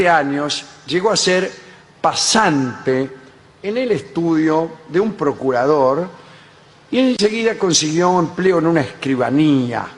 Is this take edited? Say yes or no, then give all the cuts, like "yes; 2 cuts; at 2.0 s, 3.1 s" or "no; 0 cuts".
yes; 1 cut; at 6.1 s